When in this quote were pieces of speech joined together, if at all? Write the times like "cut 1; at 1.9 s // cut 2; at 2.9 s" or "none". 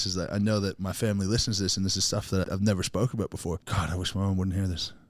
cut 1; at 2.4 s // cut 2; at 3.7 s